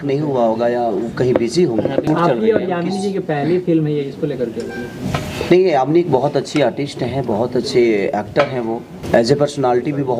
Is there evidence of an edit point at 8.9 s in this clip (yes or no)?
yes